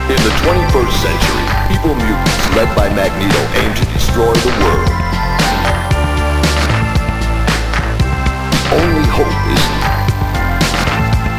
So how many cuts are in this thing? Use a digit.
0